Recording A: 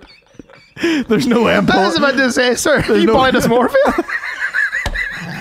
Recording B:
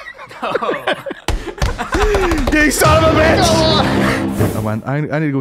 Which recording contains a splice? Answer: B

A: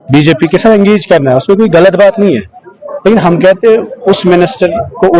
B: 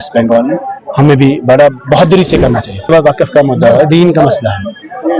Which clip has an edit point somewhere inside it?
B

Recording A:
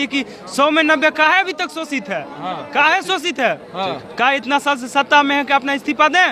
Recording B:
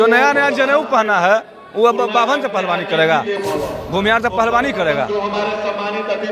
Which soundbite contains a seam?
B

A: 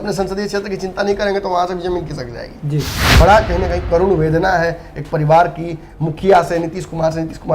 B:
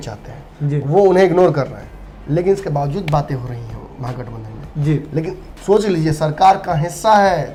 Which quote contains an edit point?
A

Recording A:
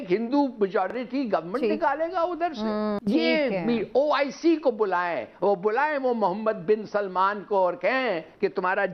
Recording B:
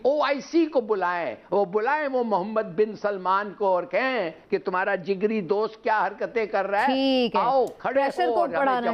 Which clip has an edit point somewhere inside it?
A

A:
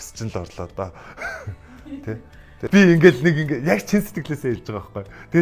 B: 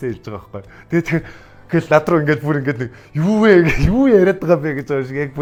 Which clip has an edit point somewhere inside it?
A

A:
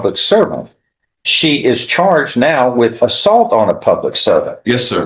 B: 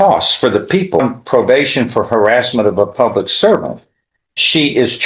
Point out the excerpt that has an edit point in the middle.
B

